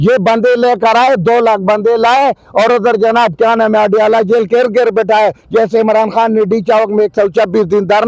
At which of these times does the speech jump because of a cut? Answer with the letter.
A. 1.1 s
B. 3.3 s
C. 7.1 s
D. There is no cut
D